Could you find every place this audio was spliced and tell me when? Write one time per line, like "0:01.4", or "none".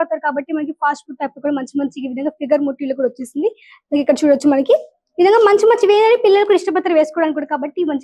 none